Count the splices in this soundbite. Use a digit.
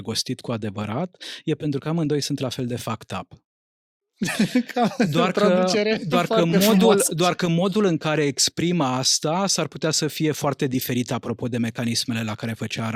0